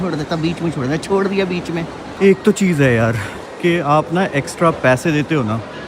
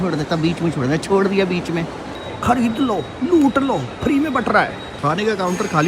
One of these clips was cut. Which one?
second; 2 cuts; at 2.0 s, 4.8 s

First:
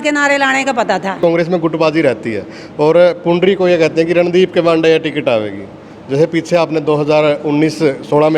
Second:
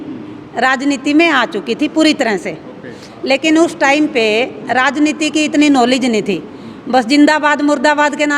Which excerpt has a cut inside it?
first; 1 cut; at 1.2 s

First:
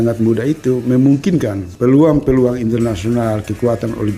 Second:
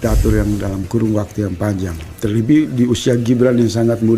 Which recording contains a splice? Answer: first; 1 cut; at 1.7 s

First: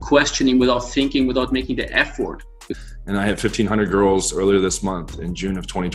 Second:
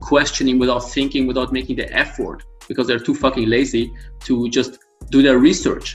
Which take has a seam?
first; 1 cut; at 2.7 s

